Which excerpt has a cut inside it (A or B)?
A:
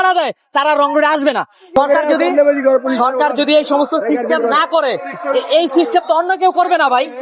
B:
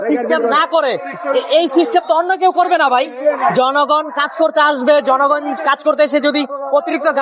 A